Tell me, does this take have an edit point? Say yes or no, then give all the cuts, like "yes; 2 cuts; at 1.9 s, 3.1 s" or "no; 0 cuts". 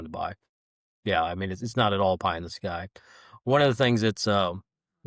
no; 0 cuts